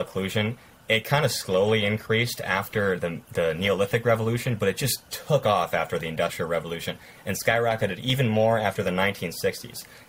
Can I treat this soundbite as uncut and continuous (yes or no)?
yes